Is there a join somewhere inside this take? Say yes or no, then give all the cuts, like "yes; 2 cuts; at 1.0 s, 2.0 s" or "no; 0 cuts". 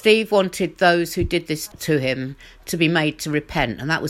yes; 1 cut; at 1.7 s